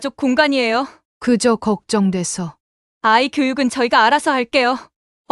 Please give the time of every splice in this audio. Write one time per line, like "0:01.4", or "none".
0:01.0